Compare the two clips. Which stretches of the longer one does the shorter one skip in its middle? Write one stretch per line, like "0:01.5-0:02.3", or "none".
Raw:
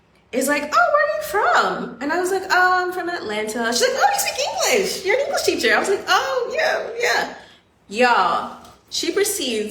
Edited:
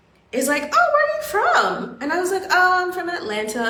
none